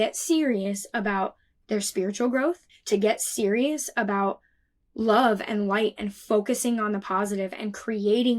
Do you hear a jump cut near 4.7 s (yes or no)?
no